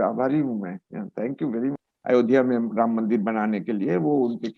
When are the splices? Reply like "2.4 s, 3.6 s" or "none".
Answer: 1.8 s